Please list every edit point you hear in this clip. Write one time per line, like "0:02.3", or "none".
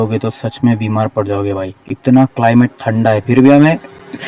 none